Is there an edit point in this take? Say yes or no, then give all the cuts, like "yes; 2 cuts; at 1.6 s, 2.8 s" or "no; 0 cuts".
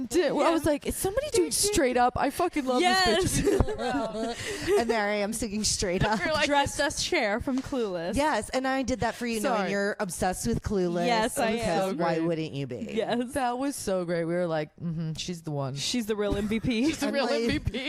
no; 0 cuts